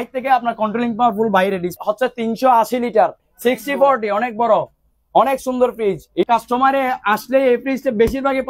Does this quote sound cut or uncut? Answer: cut